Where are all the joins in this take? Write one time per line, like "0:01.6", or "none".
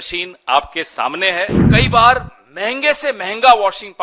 0:01.7